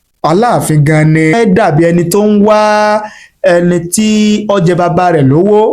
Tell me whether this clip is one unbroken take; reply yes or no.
no